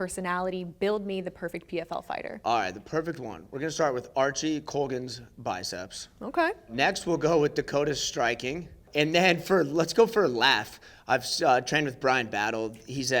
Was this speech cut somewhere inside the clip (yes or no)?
yes